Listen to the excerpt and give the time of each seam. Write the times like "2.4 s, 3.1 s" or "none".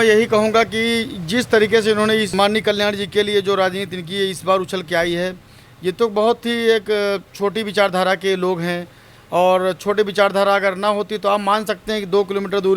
2.3 s